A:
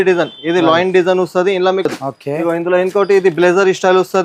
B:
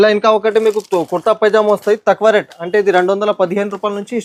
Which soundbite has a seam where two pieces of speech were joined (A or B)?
A